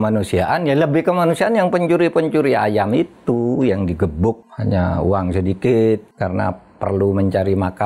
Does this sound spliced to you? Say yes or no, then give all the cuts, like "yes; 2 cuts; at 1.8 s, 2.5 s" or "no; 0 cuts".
yes; 2 cuts; at 4.5 s, 6.1 s